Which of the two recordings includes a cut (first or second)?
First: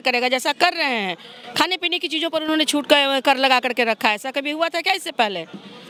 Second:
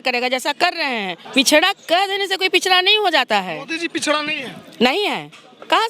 second